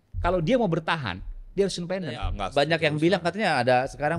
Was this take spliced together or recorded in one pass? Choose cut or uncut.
cut